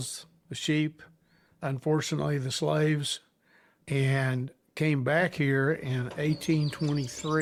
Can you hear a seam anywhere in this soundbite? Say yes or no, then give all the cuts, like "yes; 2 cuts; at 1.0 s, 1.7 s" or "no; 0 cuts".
no; 0 cuts